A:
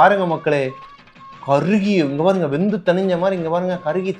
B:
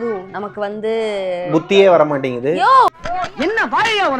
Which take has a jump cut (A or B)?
B